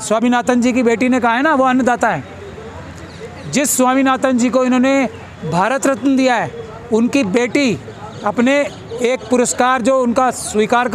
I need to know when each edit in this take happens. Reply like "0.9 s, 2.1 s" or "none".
none

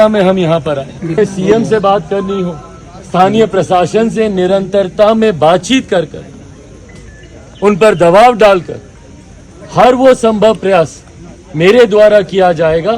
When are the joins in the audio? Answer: 1.1 s

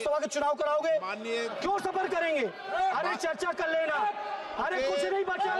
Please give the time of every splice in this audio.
1.5 s

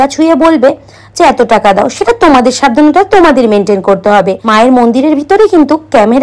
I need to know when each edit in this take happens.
4.4 s

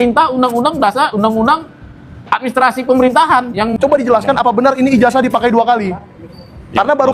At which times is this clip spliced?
3.7 s

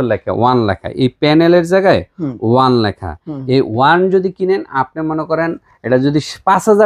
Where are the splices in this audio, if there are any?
none

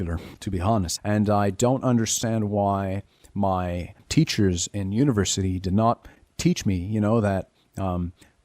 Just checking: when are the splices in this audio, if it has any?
0.9 s, 4.0 s

